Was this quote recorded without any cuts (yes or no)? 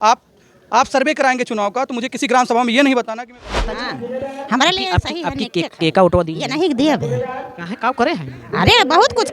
no